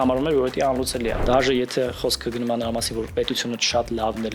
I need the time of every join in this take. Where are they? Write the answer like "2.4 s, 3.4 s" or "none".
1.2 s